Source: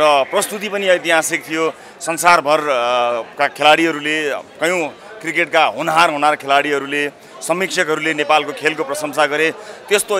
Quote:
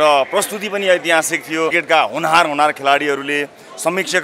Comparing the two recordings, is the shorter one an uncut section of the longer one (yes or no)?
no